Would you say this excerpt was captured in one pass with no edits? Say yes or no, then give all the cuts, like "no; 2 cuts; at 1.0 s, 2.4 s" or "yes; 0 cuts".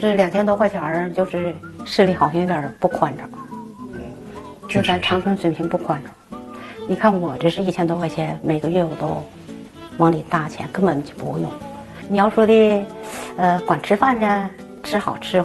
yes; 0 cuts